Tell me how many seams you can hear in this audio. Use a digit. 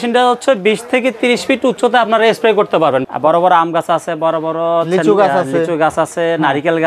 1